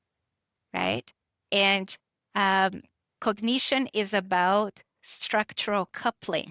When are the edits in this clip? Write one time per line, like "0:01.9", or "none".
none